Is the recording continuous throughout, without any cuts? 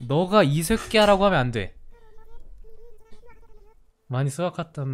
yes; 0 cuts

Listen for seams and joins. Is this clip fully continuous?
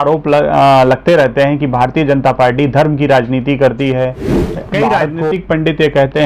no; 1 cut; at 5.3 s

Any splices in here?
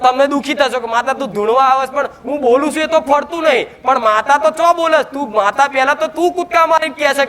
no; 0 cuts

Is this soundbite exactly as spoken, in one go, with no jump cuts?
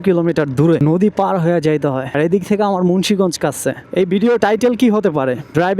no; 3 cuts; at 0.8 s, 2.0 s, 3.8 s

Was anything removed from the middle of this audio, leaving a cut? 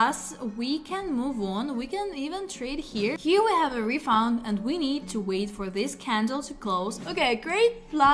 yes; 2 cuts; at 3.2 s, 7.0 s

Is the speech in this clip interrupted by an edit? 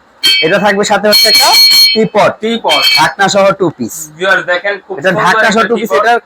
no; 0 cuts

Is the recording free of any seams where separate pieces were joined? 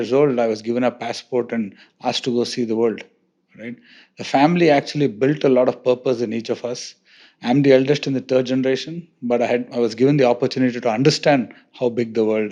yes; 0 cuts

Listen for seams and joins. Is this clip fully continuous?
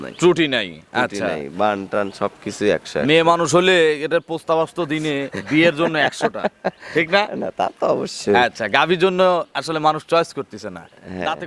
yes; 0 cuts

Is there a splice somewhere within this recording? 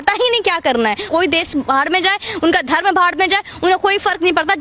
yes; 1 cut; at 1.1 s

